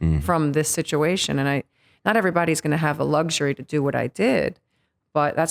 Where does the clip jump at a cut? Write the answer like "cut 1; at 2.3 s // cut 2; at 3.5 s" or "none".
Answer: none